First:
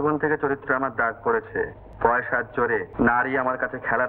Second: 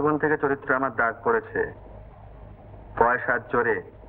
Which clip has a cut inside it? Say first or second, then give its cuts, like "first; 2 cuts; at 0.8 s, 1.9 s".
first; 2 cuts; at 1.8 s, 2.9 s